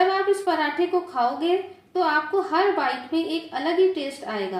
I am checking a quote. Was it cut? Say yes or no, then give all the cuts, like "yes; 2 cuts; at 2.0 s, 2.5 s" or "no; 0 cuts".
no; 0 cuts